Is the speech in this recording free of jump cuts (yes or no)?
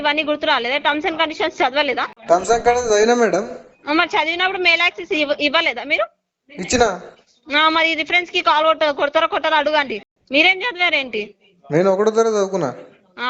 no